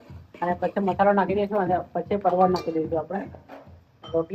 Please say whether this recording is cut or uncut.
uncut